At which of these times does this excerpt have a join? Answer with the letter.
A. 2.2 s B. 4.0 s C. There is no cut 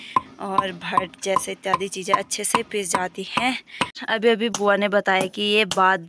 B